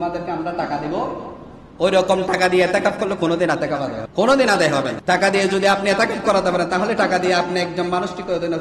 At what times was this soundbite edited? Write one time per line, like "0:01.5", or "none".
0:04.0
0:04.9